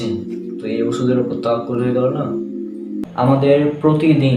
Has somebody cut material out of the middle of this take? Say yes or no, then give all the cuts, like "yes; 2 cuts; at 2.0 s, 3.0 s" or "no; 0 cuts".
yes; 1 cut; at 3.0 s